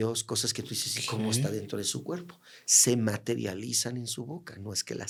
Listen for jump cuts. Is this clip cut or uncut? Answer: uncut